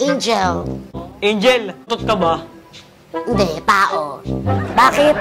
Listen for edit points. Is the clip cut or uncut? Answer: cut